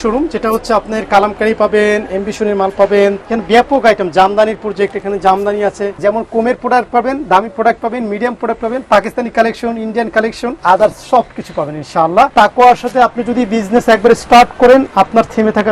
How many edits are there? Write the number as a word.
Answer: four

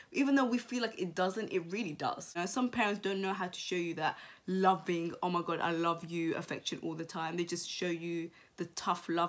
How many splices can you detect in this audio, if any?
zero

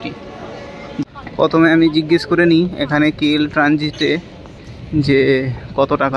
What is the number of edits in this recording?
one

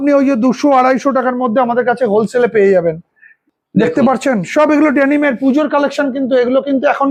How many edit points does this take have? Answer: zero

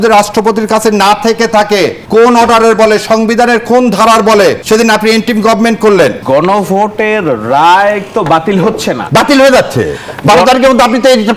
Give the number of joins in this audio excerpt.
four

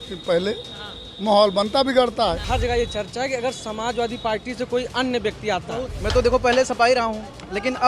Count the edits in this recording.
two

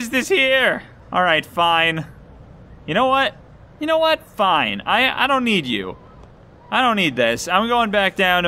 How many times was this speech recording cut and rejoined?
one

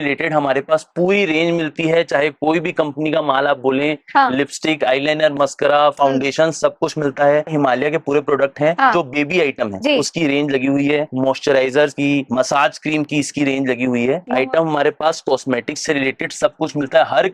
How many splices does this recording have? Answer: zero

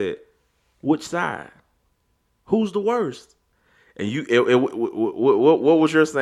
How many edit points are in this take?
zero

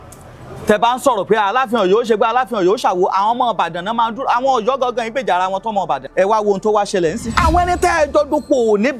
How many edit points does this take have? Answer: two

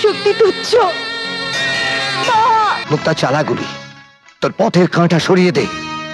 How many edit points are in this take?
one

